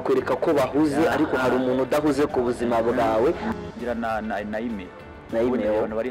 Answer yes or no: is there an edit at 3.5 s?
yes